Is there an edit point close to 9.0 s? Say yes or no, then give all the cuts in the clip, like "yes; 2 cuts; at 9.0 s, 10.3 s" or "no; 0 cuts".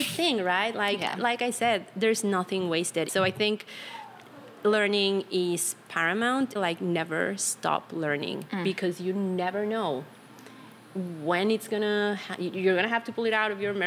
no; 2 cuts; at 3.1 s, 6.6 s